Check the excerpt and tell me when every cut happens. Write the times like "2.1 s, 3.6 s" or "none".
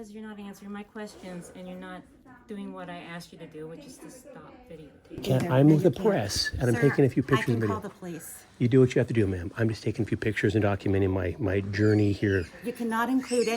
5.2 s